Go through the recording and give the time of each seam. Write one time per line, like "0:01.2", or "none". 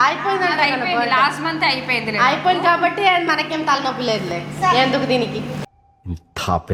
none